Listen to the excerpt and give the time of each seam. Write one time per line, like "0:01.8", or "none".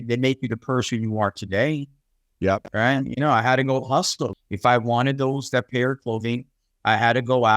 0:04.3

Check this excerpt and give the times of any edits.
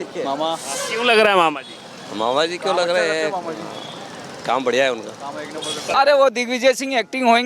0:05.8

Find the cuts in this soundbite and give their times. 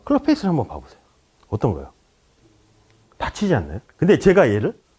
none

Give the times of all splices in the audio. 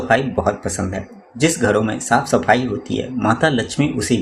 none

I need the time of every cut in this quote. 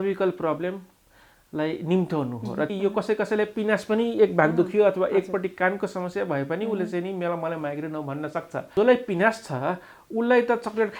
0:02.7
0:08.7

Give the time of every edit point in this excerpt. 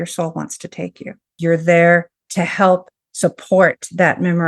0:01.4
0:02.2

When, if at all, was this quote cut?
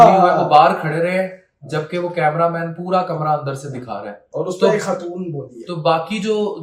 none

